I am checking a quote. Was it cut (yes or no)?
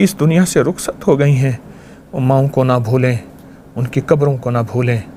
no